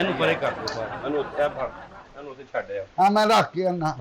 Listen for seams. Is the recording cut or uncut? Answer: uncut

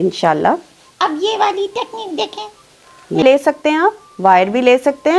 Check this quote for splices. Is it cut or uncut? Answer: cut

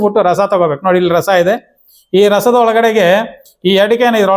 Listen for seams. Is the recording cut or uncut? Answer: cut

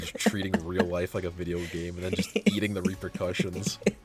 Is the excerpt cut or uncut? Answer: uncut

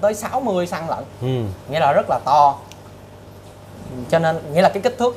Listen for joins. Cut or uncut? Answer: uncut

